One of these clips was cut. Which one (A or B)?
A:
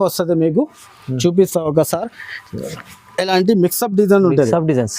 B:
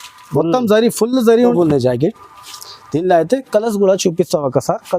B